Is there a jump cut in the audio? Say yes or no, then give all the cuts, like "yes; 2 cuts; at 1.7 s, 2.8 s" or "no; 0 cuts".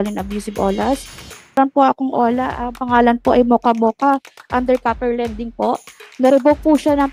yes; 1 cut; at 1.6 s